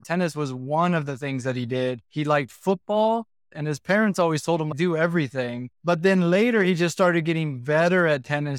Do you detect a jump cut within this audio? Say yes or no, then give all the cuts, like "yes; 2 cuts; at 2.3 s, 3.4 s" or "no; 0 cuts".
yes; 2 cuts; at 2.0 s, 3.5 s